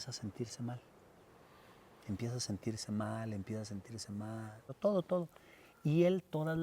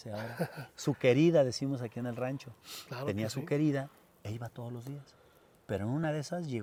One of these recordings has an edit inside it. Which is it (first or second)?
first